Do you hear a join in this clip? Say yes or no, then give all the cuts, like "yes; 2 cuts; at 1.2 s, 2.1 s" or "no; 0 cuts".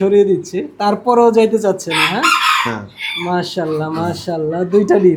no; 0 cuts